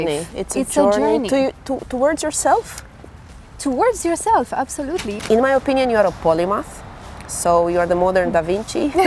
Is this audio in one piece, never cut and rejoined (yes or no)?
no